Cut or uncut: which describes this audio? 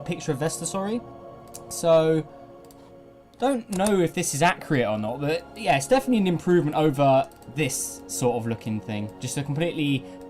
cut